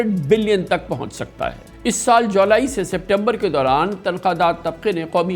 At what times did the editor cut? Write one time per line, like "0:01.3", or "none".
none